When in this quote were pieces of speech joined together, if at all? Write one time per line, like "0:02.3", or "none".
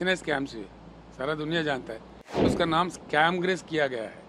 0:02.5

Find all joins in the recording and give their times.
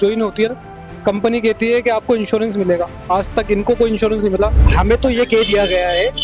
0:04.6

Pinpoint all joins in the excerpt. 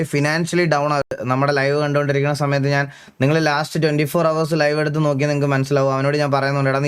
0:01.1

